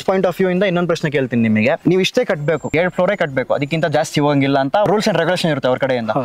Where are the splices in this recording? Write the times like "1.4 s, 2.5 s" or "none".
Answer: 1.8 s, 2.7 s, 4.9 s